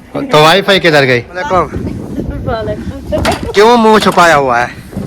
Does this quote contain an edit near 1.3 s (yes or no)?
yes